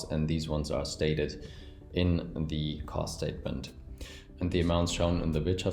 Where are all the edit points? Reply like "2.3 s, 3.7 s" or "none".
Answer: 4.3 s